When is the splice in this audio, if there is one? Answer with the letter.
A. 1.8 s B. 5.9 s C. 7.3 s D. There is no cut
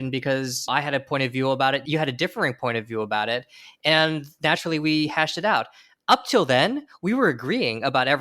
A